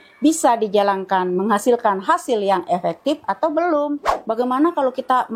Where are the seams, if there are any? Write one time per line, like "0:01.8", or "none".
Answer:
0:04.1